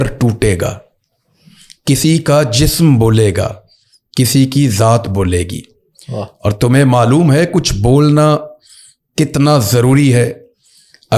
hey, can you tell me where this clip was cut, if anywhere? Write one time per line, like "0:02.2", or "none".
none